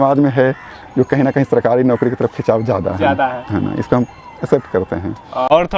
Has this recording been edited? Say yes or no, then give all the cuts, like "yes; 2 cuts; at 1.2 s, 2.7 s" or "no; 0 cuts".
no; 0 cuts